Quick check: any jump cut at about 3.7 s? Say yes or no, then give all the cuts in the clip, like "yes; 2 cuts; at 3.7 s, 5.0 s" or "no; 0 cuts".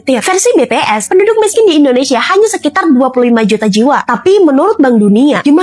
no; 0 cuts